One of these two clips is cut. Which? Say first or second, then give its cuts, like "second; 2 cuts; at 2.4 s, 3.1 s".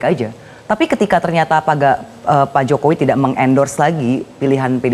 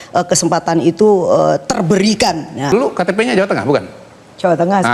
second; 1 cut; at 2.7 s